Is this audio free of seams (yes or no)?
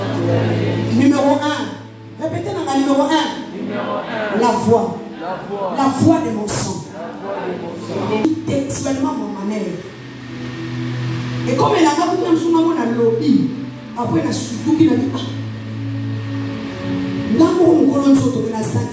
no